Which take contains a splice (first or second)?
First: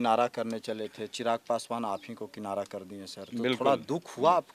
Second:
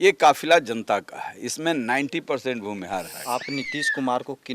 second